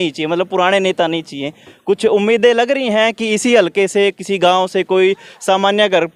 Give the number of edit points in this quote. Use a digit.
0